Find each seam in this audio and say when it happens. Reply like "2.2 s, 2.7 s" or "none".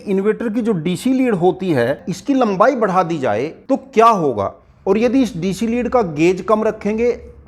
2.1 s, 3.5 s, 4.6 s